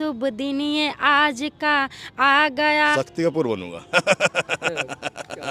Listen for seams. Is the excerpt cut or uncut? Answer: cut